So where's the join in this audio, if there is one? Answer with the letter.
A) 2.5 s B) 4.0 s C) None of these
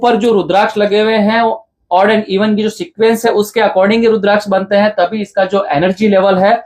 C